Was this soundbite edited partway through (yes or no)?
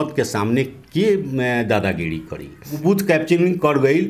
yes